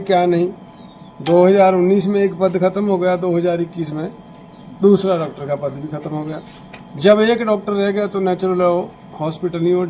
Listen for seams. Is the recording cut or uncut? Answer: uncut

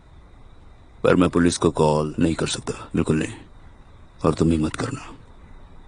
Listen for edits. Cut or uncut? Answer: uncut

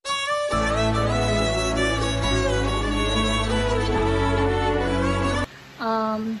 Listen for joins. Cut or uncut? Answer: cut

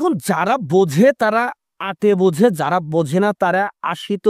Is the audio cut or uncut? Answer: uncut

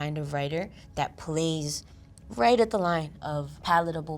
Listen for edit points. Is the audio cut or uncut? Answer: cut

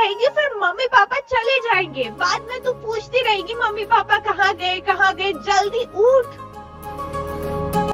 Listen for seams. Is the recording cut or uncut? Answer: uncut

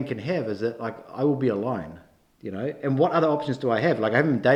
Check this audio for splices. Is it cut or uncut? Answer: uncut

